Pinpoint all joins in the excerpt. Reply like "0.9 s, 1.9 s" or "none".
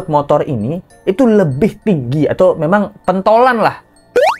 none